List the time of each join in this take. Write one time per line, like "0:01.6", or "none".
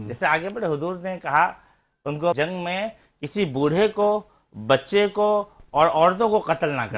0:02.4